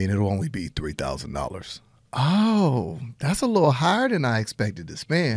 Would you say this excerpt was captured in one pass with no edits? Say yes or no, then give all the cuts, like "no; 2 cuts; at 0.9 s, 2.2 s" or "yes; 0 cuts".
yes; 0 cuts